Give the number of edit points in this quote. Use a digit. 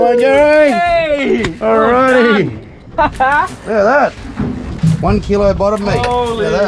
1